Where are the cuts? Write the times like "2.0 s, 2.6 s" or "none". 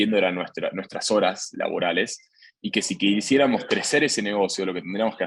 none